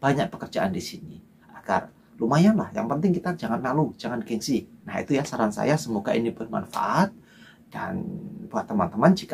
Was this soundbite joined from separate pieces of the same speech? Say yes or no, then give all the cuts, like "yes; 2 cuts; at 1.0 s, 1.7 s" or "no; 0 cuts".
no; 0 cuts